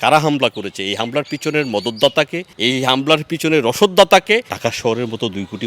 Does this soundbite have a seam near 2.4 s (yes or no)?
yes